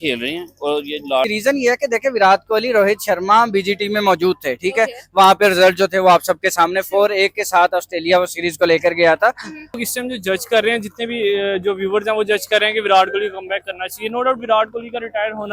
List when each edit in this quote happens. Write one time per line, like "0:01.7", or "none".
0:01.3
0:09.8